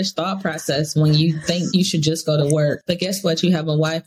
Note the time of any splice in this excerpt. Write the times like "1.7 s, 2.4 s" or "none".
1.7 s, 2.8 s

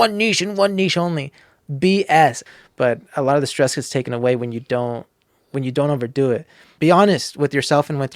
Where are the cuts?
2.4 s, 6.6 s

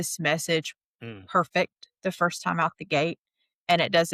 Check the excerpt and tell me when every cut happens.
none

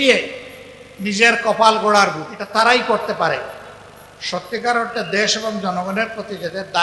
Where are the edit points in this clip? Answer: 2.3 s

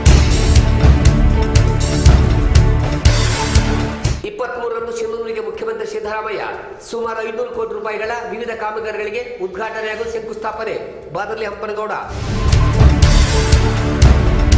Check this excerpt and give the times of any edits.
none

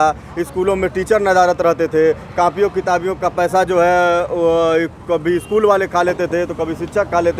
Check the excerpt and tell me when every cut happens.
none

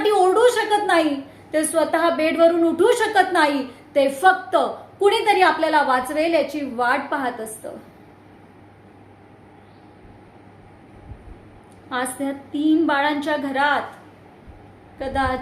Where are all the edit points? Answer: 7.3 s

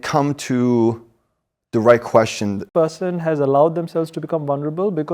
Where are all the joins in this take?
2.7 s

